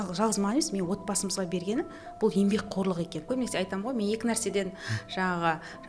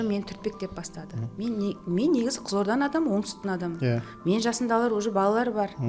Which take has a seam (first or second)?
first